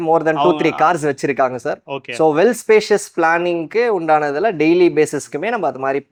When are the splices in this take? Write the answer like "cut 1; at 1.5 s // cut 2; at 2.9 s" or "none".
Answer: none